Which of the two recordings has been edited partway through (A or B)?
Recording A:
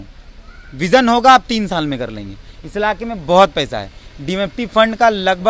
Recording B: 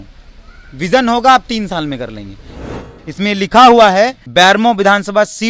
B